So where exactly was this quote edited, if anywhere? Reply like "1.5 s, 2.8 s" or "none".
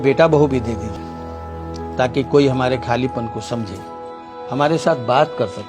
1.0 s